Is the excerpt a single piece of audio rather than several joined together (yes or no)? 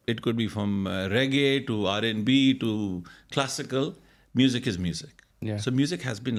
yes